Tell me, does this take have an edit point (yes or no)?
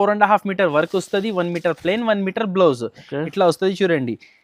no